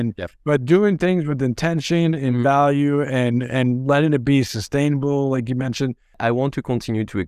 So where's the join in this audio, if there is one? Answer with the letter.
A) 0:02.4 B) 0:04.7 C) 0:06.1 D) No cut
C